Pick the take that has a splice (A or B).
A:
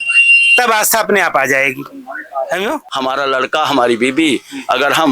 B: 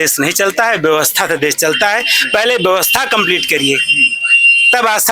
A